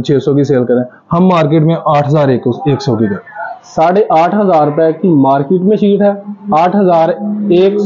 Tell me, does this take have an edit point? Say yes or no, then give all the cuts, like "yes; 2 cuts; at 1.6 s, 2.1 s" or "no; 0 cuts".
no; 0 cuts